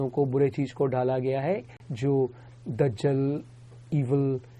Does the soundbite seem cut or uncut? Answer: cut